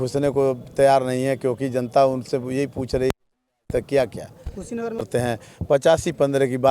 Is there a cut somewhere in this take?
yes; 1 cut; at 5.1 s

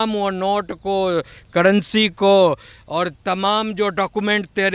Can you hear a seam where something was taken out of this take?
no; 0 cuts

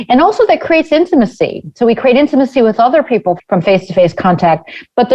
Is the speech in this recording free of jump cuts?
no; 1 cut; at 3.4 s

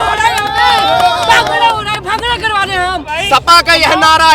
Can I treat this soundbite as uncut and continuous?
no; 1 cut; at 3.1 s

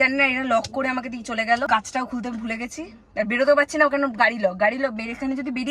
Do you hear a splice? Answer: yes; 1 cut; at 1.7 s

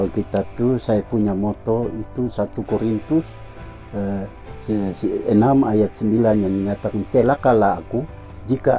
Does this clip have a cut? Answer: no; 0 cuts

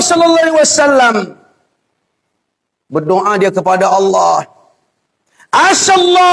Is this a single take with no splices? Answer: yes; 0 cuts

